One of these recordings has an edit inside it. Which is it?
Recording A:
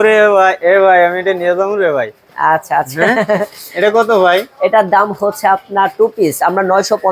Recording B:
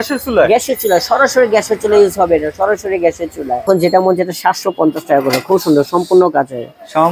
B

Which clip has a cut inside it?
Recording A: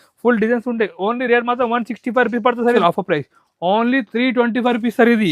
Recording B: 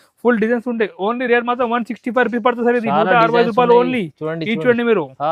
A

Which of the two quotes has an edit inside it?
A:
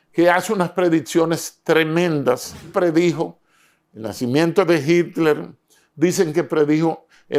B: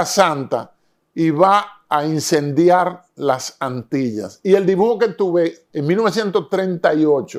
A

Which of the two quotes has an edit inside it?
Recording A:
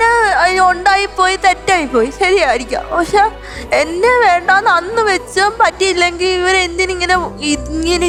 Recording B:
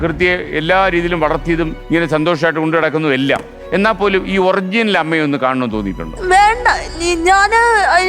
B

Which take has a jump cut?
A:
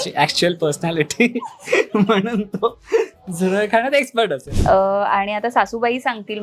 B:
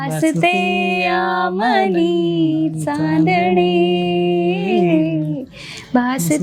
A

